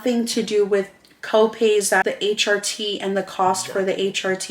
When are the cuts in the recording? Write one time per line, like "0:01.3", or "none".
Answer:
0:01.9